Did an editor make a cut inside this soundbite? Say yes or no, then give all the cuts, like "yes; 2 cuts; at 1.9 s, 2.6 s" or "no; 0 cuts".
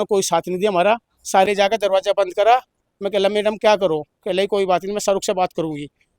yes; 1 cut; at 1.4 s